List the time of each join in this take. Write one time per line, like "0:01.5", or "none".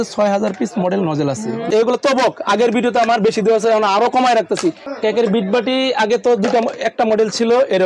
0:01.6
0:04.8